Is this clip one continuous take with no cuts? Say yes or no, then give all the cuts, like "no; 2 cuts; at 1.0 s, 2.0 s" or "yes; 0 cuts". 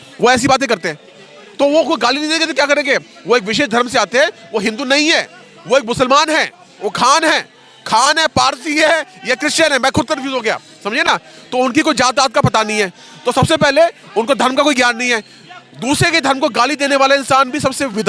yes; 0 cuts